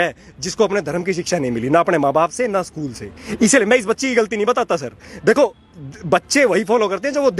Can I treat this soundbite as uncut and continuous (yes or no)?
yes